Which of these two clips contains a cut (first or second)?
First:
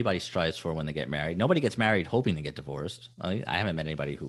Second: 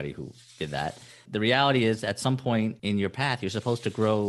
second